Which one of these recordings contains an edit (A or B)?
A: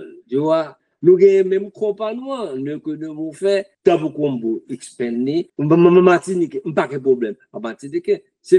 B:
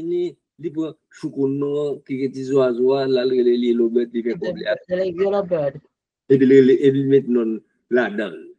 A